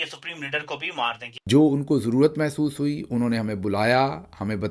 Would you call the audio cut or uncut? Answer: cut